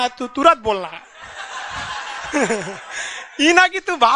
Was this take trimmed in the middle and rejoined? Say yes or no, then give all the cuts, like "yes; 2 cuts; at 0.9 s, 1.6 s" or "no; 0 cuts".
no; 0 cuts